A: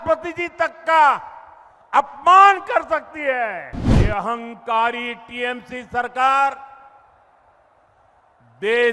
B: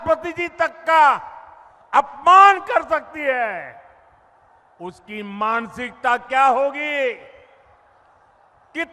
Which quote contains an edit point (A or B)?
A